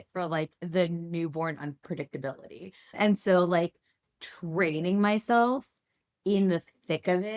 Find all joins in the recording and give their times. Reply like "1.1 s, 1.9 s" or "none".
2.9 s